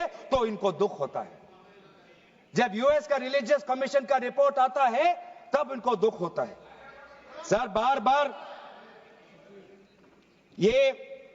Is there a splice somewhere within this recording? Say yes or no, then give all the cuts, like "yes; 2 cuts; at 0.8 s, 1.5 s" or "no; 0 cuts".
no; 0 cuts